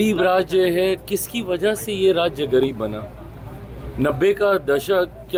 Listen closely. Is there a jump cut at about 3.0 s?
no; 0 cuts

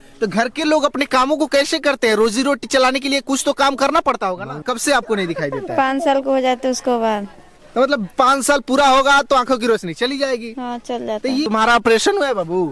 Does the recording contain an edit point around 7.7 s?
no; 2 cuts; at 4.6 s, 11.5 s

